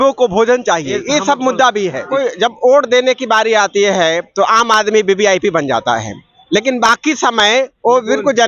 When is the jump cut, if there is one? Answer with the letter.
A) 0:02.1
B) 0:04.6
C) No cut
A